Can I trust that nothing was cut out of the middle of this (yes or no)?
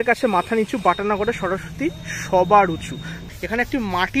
no